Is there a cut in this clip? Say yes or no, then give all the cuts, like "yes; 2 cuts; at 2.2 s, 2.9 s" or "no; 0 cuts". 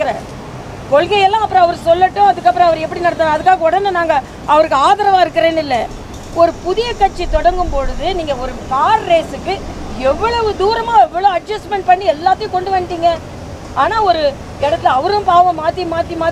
no; 0 cuts